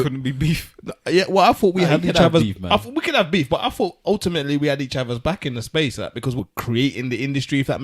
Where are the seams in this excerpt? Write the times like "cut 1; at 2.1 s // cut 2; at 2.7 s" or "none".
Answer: cut 1; at 6.3 s